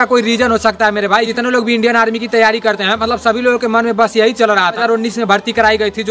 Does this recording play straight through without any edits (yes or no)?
no